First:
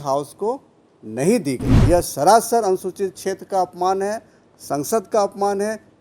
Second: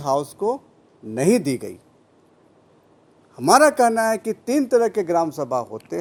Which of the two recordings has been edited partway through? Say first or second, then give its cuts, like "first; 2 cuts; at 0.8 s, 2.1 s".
first; 1 cut; at 1.7 s